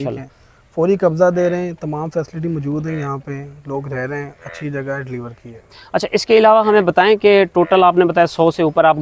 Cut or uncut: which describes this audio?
uncut